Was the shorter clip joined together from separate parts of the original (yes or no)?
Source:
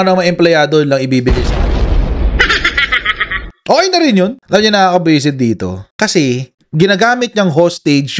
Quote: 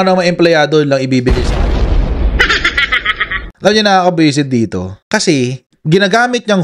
yes